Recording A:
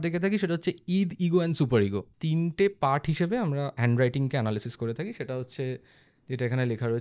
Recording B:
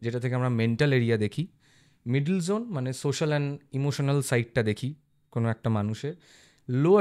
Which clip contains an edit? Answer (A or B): A